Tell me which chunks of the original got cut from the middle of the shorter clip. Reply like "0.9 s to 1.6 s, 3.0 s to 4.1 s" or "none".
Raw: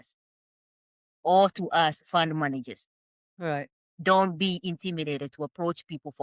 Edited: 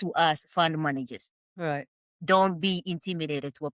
3.4 s to 3.6 s